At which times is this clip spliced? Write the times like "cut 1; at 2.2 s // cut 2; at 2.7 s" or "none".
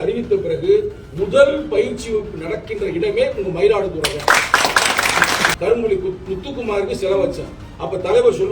cut 1; at 5.5 s